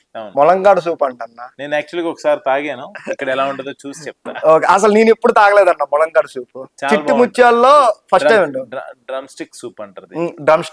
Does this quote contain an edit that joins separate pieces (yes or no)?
no